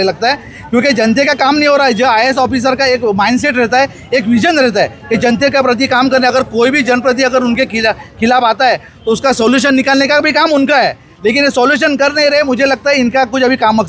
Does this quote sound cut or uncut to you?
uncut